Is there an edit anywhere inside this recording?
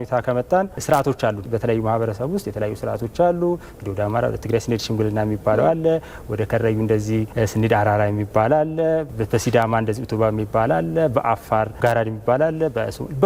yes; 2 cuts; at 7.3 s, 11.8 s

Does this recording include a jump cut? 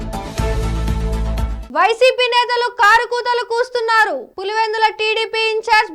yes; 1 cut; at 1.5 s

